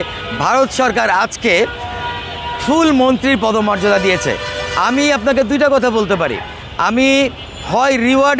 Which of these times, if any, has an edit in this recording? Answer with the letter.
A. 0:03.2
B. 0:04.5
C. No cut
C